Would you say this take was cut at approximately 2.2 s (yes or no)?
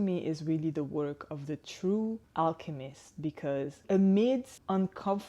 yes